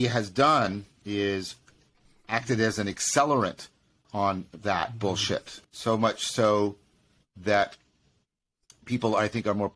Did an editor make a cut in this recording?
yes; 3 cuts; at 1.0 s, 4.1 s, 5.5 s

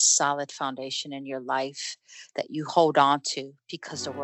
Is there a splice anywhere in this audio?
no; 0 cuts

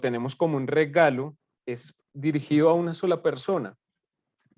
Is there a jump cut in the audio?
no; 0 cuts

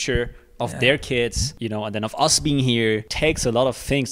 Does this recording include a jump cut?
yes; 2 cuts; at 1.5 s, 3.1 s

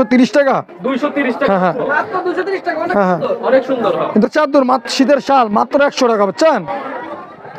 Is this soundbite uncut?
no; 1 cut; at 4.3 s

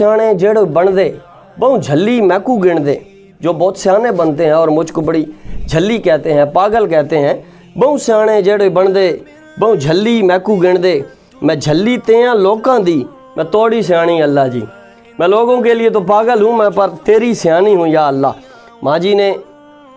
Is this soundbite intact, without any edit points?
yes; 0 cuts

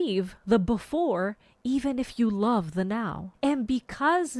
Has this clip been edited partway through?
yes; 1 cut; at 3.2 s

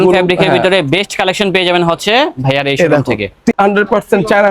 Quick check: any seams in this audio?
yes; 1 cut; at 3.5 s

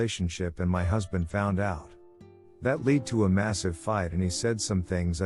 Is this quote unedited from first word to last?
no; 1 cut; at 2.2 s

